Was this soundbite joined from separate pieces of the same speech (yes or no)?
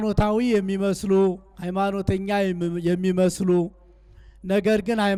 no